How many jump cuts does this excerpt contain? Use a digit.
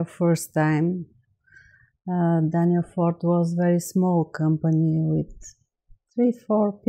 0